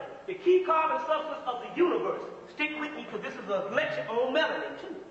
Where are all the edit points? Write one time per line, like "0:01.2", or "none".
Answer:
none